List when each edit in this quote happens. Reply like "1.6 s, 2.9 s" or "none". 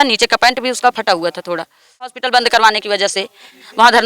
2.2 s